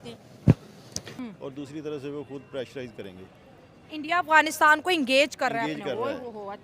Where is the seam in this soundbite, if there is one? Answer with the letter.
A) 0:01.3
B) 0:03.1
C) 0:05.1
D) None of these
A